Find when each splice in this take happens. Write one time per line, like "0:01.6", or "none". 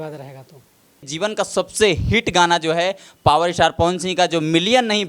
0:01.1